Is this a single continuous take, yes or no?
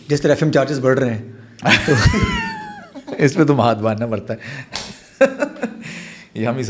yes